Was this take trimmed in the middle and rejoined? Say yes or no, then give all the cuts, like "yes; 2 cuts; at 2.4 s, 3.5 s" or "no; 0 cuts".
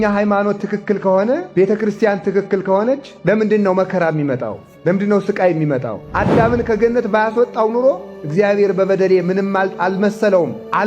yes; 2 cuts; at 1.5 s, 6.0 s